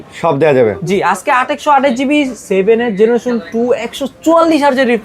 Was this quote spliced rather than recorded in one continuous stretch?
no; 0 cuts

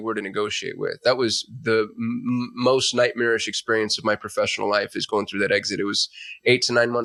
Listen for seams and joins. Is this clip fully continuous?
yes; 0 cuts

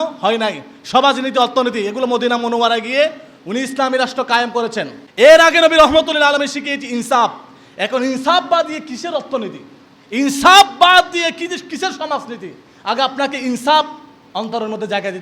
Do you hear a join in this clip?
yes; 1 cut; at 5.0 s

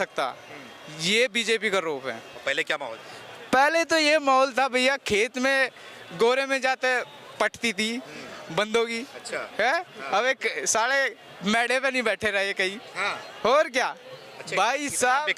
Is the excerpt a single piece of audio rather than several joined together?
yes; 0 cuts

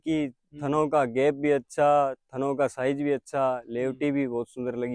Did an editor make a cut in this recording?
no; 0 cuts

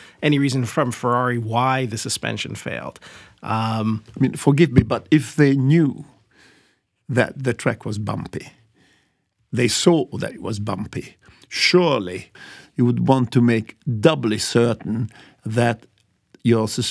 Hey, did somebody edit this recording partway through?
no; 0 cuts

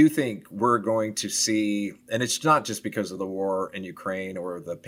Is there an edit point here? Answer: no; 0 cuts

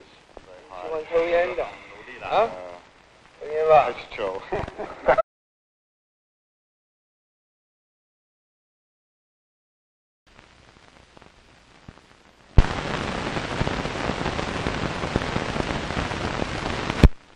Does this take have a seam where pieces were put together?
no; 0 cuts

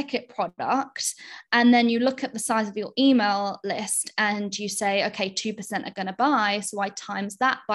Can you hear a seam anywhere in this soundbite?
no; 0 cuts

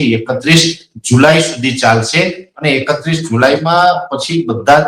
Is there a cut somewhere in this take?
no; 0 cuts

